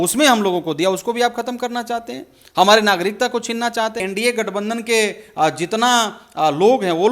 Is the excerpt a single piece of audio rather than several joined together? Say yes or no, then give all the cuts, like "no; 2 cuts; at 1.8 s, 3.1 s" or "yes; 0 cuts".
no; 1 cut; at 4.0 s